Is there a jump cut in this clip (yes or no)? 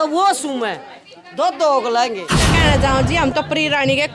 yes